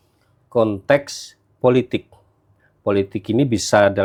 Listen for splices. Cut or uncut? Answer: uncut